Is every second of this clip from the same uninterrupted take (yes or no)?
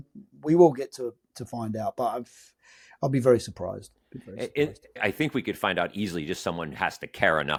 yes